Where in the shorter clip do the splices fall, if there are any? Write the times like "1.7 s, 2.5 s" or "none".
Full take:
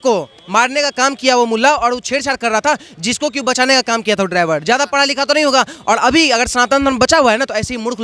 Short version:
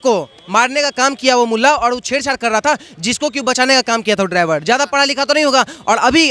none